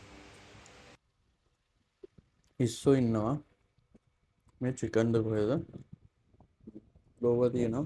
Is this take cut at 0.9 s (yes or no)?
yes